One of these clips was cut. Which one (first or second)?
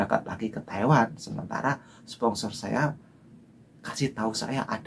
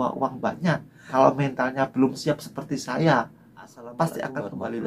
second